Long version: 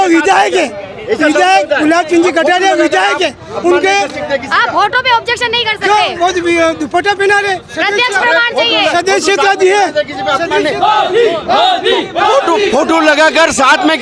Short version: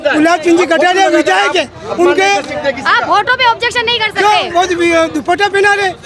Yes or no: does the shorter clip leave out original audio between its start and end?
no